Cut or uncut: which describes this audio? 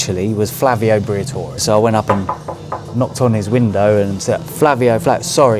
cut